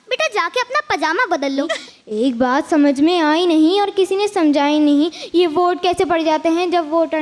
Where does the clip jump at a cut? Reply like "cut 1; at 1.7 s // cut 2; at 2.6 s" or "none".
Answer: cut 1; at 1.8 s